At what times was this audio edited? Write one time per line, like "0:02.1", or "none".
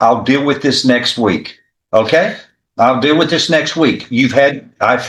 none